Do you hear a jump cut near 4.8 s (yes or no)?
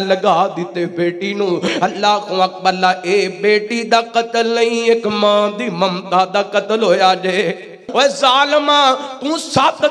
no